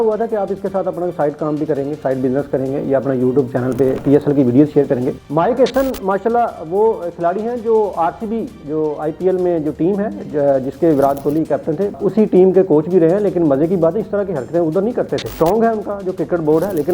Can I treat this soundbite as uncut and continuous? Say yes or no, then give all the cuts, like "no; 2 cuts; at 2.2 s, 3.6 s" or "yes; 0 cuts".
no; 3 cuts; at 5.2 s, 12.0 s, 15.2 s